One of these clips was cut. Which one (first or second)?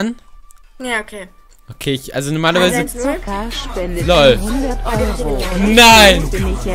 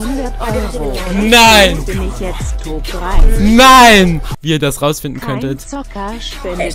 second